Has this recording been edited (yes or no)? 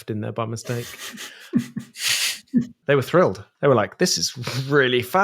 yes